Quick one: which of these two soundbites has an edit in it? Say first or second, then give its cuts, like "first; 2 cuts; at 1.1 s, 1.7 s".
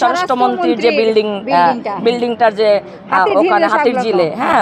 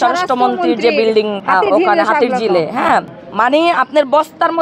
second; 2 cuts; at 1.4 s, 3.2 s